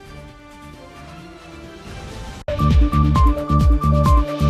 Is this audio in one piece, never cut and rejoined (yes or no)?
yes